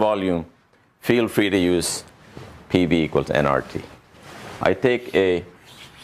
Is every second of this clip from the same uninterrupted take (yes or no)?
yes